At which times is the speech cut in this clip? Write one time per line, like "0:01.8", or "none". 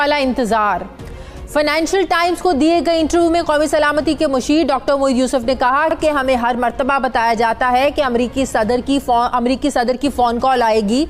none

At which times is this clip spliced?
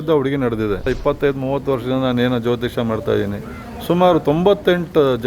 0:00.9

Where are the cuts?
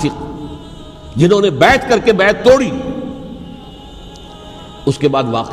0:03.7

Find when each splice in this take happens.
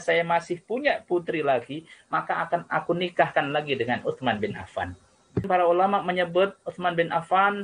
0:05.5

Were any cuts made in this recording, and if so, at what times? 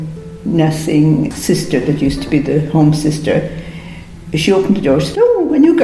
0:01.3

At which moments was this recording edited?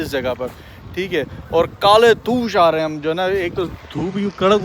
none

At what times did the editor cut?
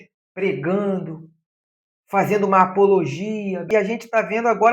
0:03.6

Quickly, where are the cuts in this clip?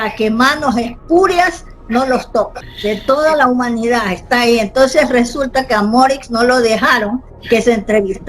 0:02.6

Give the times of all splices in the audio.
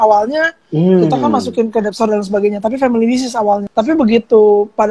0:03.7

